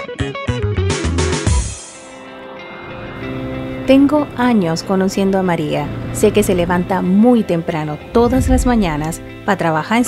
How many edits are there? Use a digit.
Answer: 1